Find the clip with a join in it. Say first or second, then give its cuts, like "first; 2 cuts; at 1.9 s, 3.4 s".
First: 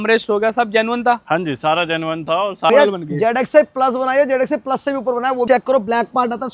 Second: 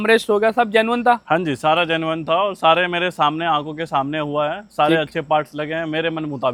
first; 2 cuts; at 2.7 s, 5.5 s